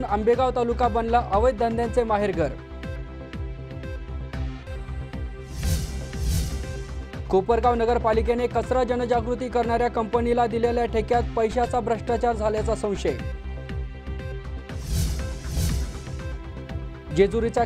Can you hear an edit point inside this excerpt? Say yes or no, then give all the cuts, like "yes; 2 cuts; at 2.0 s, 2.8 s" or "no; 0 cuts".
no; 0 cuts